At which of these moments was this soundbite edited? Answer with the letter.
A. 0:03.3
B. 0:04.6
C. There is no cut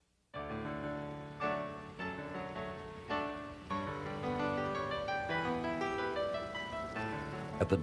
A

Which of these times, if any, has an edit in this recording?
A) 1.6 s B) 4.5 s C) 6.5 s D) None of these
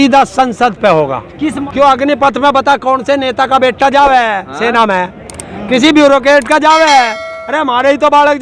A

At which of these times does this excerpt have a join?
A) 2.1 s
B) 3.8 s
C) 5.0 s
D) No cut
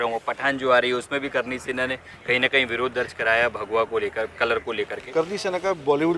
C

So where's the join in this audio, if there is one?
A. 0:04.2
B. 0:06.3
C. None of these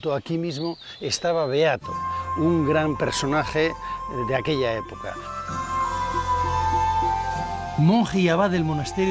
B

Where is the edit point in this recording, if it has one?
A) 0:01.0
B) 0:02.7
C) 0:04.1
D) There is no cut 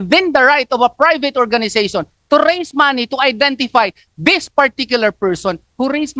D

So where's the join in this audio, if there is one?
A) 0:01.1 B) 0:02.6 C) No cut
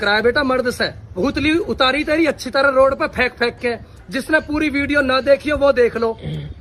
A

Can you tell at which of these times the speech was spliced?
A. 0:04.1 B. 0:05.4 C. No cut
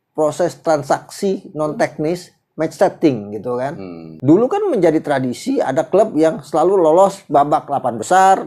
A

